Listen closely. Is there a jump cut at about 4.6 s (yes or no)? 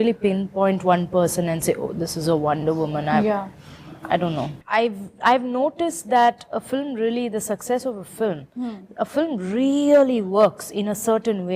yes